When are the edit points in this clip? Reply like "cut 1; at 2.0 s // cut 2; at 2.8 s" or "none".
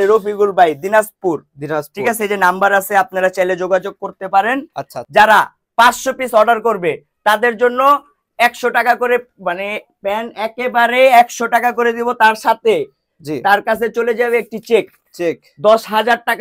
cut 1; at 4.9 s